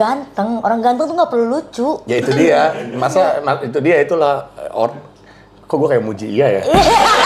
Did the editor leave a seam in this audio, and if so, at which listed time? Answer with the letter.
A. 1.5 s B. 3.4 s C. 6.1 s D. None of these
D